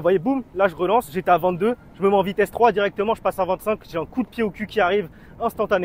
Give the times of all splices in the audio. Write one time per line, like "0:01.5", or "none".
none